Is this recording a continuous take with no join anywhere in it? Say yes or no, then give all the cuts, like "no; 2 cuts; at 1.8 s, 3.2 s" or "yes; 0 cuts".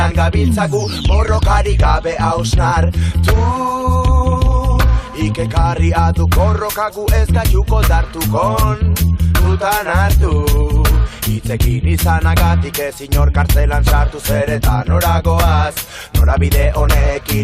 no; 1 cut; at 13.8 s